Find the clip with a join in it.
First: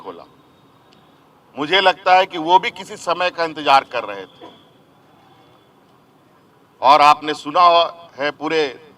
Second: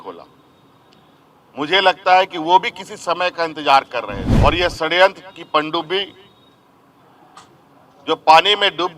second; 1 cut; at 4.2 s

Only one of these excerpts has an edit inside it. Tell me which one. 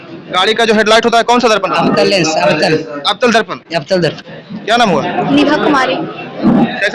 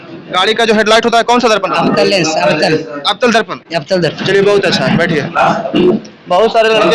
first; 1 cut; at 4.2 s

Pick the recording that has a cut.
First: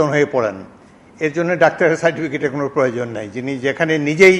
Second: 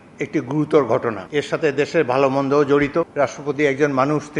second; 2 cuts; at 1.2 s, 3.1 s

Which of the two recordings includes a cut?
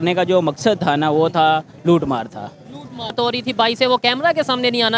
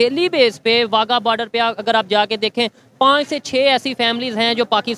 first; 1 cut; at 3.1 s

